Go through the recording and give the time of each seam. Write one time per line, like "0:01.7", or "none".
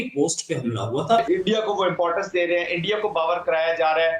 0:01.2